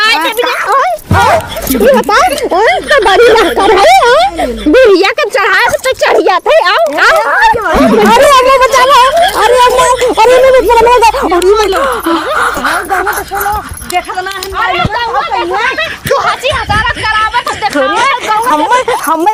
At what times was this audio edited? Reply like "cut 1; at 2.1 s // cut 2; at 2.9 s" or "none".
none